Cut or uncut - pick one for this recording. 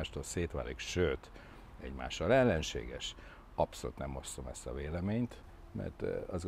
uncut